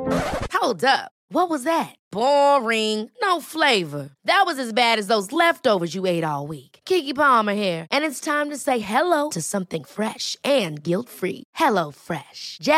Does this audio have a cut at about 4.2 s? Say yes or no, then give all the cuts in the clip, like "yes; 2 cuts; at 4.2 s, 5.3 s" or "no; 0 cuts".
no; 0 cuts